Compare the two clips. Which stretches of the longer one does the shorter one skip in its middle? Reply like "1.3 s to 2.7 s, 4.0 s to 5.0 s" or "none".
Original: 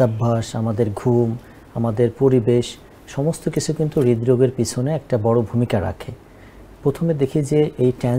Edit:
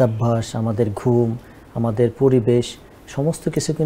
none